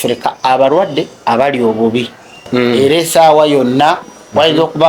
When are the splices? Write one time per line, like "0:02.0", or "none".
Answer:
0:02.8